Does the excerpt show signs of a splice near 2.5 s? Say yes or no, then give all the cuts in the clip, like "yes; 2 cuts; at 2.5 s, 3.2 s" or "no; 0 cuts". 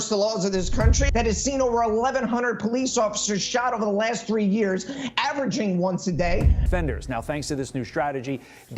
no; 2 cuts; at 1.1 s, 6.6 s